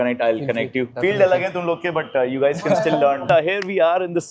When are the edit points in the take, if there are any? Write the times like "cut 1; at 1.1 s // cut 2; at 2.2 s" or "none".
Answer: cut 1; at 0.9 s // cut 2; at 3.3 s